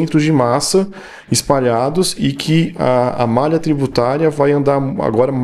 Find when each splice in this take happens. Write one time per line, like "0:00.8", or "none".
none